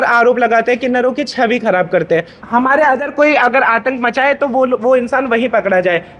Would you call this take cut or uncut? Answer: cut